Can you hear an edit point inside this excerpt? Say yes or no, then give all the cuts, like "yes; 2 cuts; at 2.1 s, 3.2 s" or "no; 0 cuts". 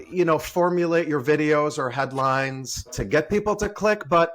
yes; 1 cut; at 3.0 s